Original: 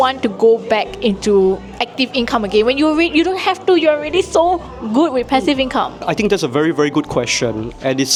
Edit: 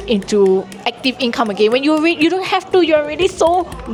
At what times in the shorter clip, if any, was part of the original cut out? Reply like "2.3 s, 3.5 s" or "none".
none